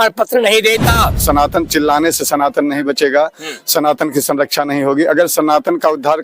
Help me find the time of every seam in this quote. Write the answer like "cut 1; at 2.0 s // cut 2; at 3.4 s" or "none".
cut 1; at 1.2 s